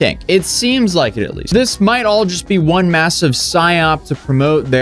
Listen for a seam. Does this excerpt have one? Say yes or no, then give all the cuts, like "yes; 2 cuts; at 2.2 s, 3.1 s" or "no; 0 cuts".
yes; 1 cut; at 1.4 s